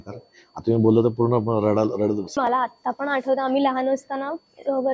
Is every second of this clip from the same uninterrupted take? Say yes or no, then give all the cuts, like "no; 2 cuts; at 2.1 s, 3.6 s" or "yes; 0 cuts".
no; 1 cut; at 2.4 s